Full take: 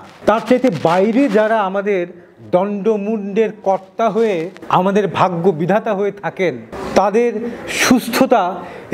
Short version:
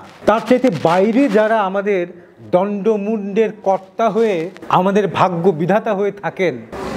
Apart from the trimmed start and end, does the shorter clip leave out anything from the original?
no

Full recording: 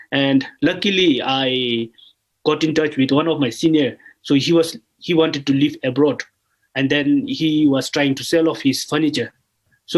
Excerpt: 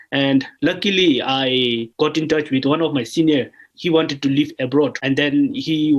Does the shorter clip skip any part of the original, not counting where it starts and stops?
yes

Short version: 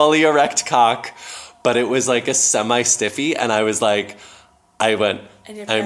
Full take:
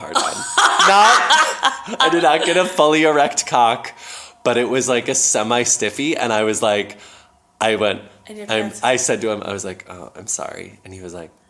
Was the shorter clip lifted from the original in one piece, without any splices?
yes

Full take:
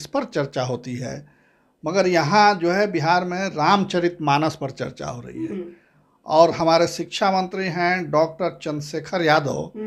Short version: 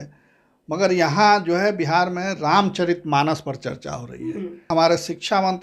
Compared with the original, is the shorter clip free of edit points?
no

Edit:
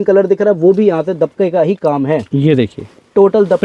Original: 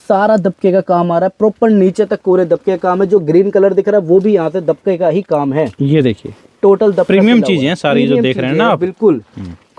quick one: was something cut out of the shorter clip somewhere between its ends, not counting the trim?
no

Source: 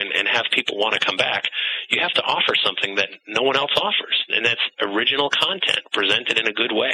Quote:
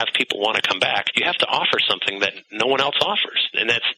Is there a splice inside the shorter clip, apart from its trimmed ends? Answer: yes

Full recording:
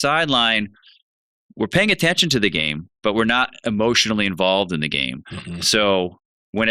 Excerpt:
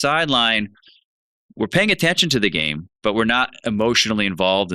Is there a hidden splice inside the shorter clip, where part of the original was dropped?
no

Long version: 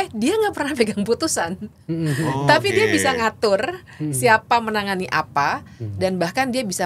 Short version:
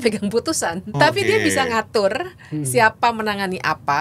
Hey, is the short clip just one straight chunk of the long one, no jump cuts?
no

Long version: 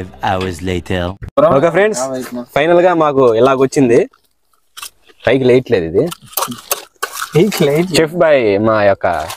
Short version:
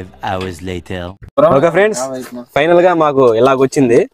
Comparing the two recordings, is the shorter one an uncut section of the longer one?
yes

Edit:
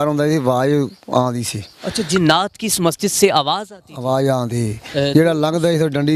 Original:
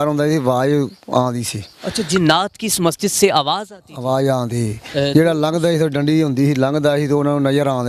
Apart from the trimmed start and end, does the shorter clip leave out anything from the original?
no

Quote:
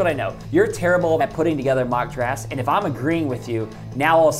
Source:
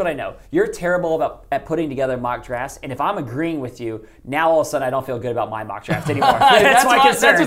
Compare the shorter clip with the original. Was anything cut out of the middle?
yes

